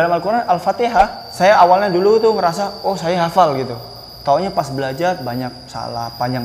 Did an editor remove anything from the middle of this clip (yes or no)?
yes